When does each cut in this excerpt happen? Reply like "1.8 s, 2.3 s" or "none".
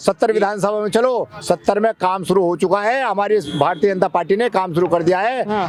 none